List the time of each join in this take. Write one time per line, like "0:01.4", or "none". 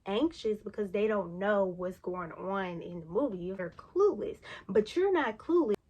0:03.6